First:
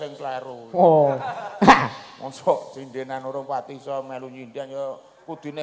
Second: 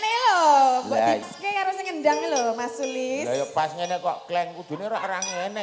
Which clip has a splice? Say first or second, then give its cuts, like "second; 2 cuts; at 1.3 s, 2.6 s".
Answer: second; 1 cut; at 1.3 s